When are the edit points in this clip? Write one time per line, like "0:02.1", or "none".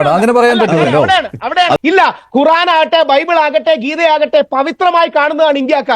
0:01.8